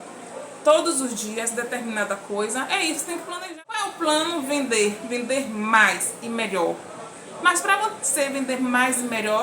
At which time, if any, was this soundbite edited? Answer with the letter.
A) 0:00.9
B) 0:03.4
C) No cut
B